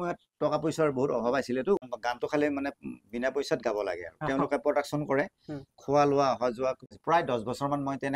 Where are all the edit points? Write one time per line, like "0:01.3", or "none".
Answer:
0:01.9
0:06.9